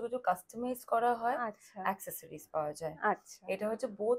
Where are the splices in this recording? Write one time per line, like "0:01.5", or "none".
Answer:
none